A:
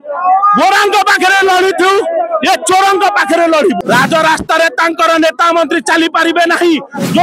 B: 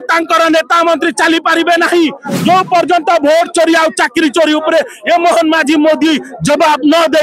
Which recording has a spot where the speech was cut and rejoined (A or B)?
A